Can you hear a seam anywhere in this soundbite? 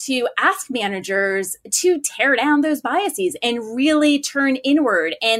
no; 0 cuts

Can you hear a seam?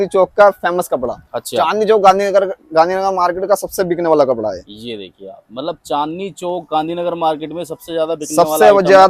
no; 0 cuts

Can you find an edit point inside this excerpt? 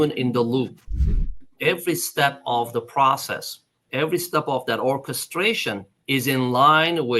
yes; 2 cuts; at 1.3 s, 5.9 s

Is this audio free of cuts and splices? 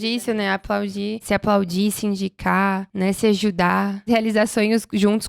no; 3 cuts; at 1.2 s, 2.9 s, 4.0 s

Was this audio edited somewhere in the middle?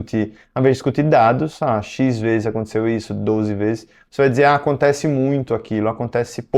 no; 0 cuts

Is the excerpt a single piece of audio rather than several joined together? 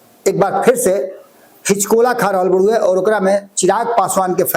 yes; 0 cuts

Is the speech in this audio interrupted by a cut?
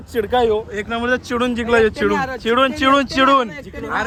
no; 0 cuts

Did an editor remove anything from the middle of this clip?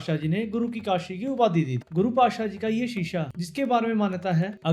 yes; 1 cut; at 1.8 s

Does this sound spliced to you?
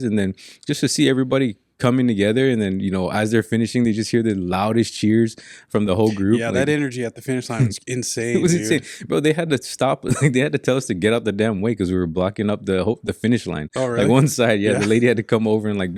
no; 0 cuts

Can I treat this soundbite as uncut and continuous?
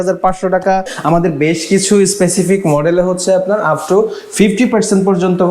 no; 1 cut; at 0.9 s

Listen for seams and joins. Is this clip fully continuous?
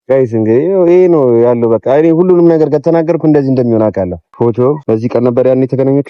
no; 2 cuts; at 4.2 s, 4.8 s

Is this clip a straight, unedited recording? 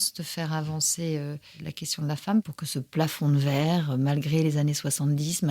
no; 2 cuts; at 1.6 s, 2.4 s

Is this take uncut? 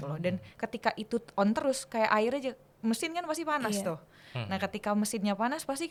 yes; 0 cuts

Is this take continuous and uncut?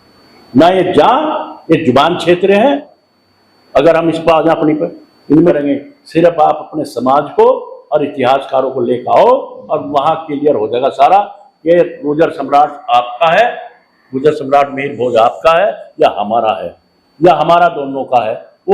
no; 2 cuts; at 2.9 s, 5.5 s

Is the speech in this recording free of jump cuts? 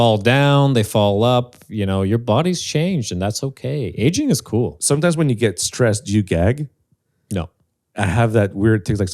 no; 1 cut; at 4.8 s

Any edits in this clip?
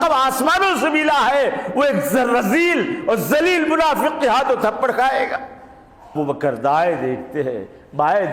yes; 1 cut; at 6.1 s

